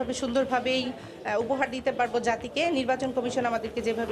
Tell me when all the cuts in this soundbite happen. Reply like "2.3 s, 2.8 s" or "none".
none